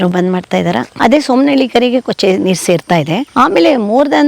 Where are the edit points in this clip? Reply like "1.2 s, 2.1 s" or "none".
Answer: 0.9 s, 3.2 s